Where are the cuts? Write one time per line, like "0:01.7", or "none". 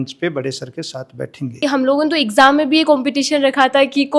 0:01.6